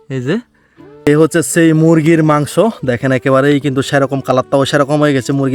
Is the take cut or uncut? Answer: cut